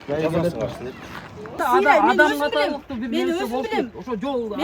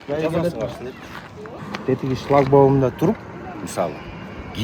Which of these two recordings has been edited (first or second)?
first